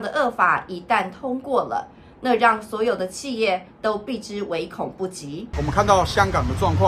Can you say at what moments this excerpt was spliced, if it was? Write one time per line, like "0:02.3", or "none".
0:05.5